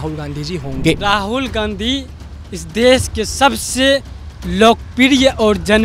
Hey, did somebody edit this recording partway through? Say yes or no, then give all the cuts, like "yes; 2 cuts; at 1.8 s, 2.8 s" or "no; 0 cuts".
no; 0 cuts